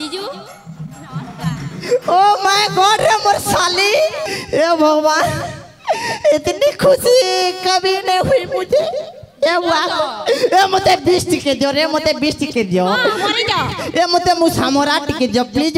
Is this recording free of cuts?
no; 1 cut; at 4.2 s

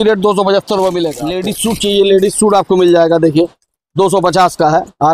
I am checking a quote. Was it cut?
yes; 1 cut; at 1.5 s

